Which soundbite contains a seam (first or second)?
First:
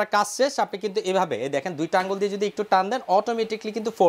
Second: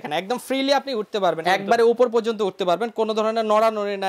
second